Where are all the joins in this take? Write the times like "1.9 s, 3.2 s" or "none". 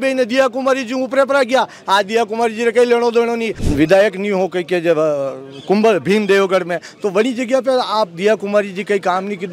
3.6 s